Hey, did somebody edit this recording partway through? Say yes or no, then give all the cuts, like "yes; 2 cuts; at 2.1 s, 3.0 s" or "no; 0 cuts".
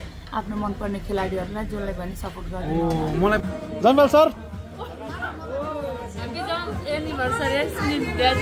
yes; 1 cut; at 3.4 s